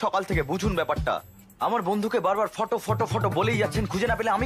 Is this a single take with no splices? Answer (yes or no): yes